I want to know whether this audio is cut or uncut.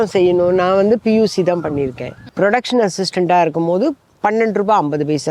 cut